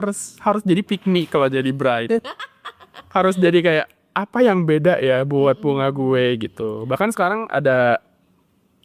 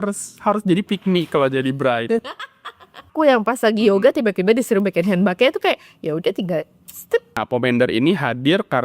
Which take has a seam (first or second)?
second